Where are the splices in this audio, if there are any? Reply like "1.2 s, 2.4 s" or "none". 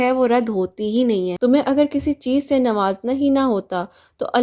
1.3 s